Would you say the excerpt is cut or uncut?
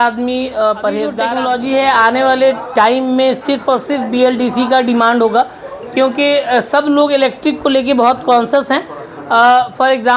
cut